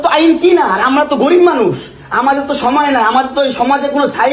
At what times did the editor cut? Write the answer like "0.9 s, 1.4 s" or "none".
2.0 s